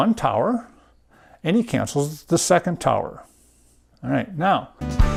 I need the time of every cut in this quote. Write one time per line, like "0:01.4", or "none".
none